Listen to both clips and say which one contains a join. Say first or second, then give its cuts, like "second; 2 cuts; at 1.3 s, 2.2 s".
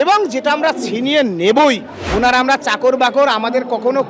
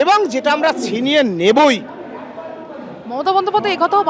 first; 1 cut; at 2.0 s